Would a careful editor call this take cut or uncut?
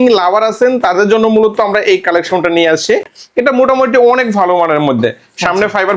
uncut